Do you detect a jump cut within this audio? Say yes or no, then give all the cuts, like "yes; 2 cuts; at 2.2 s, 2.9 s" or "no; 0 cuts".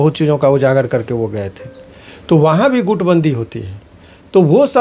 no; 0 cuts